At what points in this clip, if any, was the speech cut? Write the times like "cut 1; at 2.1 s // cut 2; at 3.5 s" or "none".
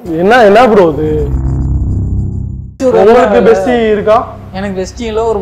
cut 1; at 2.7 s